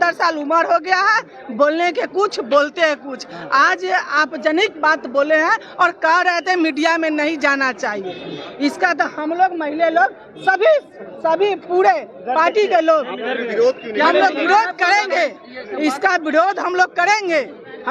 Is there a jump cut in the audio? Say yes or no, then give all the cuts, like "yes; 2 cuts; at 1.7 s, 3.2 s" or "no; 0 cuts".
no; 0 cuts